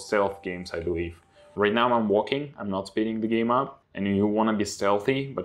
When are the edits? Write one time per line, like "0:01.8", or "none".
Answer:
0:01.5
0:03.8